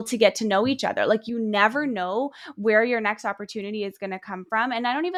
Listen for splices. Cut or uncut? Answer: uncut